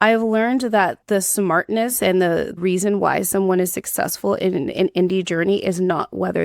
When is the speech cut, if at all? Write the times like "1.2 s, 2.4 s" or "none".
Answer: 1.0 s, 2.6 s